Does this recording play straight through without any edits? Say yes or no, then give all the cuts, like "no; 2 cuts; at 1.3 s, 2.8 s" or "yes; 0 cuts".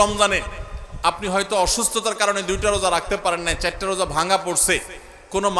yes; 0 cuts